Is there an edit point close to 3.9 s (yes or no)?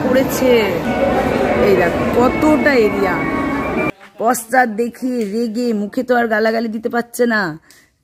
yes